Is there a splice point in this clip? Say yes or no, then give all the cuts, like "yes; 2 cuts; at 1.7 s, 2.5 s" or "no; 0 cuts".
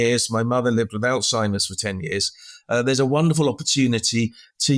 no; 0 cuts